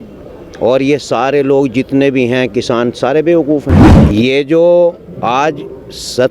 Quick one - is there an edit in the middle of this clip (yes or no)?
yes